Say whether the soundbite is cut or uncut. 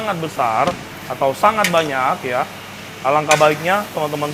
uncut